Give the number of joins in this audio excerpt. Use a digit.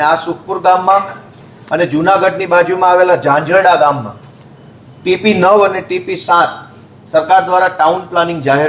0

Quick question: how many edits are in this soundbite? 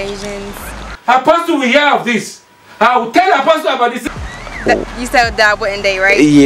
2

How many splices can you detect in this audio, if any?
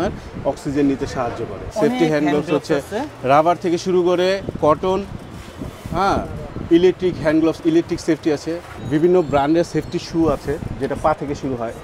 2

